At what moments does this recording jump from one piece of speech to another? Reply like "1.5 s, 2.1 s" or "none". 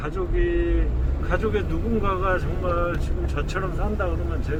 none

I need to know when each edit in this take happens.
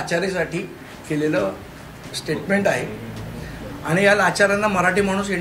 none

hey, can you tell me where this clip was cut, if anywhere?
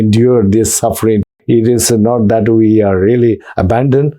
1.2 s

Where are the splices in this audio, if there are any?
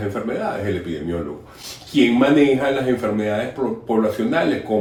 none

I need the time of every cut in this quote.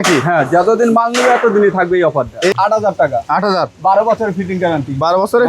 2.5 s

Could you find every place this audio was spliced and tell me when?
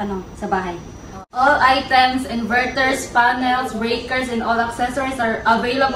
none

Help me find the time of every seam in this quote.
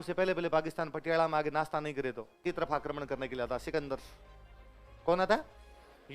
2.4 s

